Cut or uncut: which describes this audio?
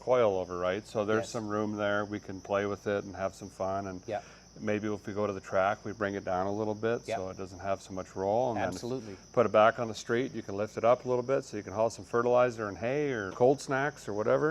cut